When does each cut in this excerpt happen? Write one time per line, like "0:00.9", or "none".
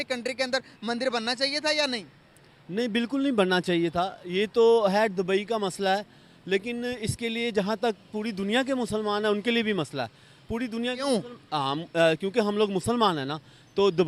none